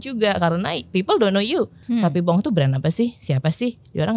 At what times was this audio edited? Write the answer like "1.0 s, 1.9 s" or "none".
1.8 s

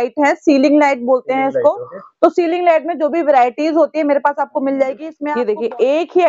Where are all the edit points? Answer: 5.1 s

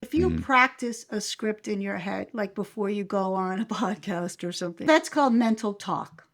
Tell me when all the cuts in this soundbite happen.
4.9 s

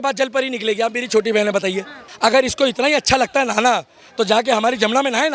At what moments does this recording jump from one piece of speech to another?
2.0 s

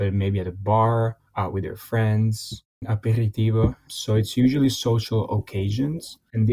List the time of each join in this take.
1.2 s, 2.8 s, 3.9 s

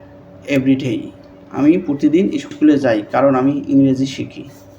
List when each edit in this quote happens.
2.5 s

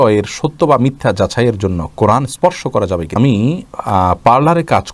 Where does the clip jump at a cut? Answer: 3.2 s

